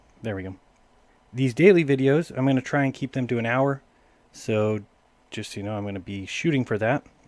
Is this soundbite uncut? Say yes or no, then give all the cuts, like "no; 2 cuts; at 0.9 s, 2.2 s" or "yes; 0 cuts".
yes; 0 cuts